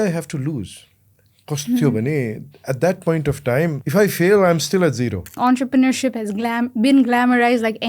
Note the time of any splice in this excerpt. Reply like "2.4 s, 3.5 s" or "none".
3.8 s, 5.4 s

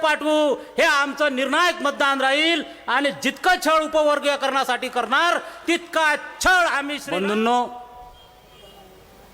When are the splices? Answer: 7.0 s

